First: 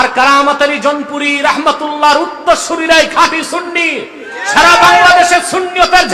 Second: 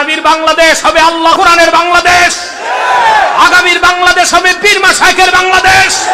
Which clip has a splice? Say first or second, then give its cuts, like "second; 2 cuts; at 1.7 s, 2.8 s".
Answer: second; 1 cut; at 1.3 s